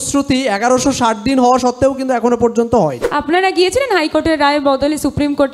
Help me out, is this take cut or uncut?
cut